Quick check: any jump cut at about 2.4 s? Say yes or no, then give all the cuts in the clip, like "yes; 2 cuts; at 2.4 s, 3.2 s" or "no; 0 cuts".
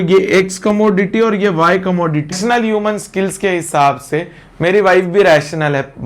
yes; 1 cut; at 2.4 s